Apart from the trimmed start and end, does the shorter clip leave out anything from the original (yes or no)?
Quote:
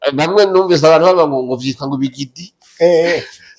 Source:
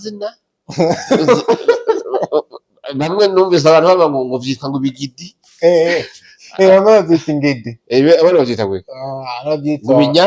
no